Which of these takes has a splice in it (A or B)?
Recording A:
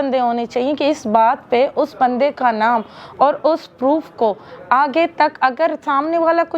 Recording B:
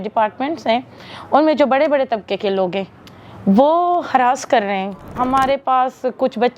B